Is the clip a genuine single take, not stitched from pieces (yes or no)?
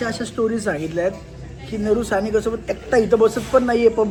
yes